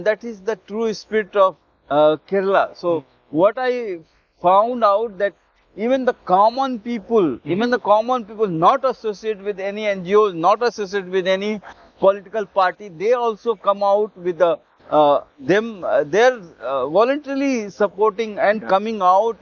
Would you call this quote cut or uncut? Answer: uncut